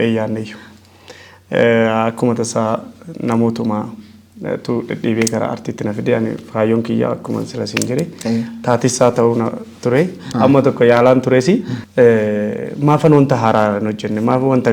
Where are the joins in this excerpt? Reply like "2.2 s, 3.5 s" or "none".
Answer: 10.3 s, 11.8 s